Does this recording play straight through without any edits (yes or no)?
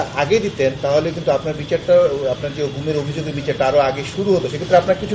yes